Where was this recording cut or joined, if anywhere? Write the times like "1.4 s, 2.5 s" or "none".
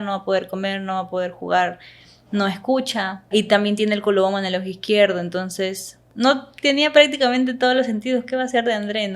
3.2 s, 6.0 s